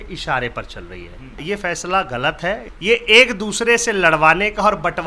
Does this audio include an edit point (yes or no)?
yes